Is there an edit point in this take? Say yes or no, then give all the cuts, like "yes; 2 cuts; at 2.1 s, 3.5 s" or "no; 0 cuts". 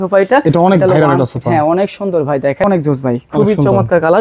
yes; 1 cut; at 2.6 s